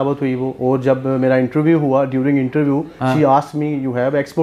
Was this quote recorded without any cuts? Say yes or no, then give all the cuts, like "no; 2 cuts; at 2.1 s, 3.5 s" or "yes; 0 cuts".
yes; 0 cuts